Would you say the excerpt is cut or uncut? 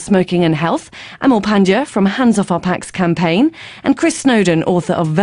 cut